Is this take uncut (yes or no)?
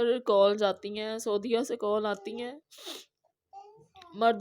yes